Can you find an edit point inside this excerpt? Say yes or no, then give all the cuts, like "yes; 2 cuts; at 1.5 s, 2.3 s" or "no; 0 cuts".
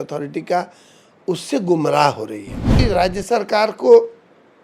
yes; 1 cut; at 2.8 s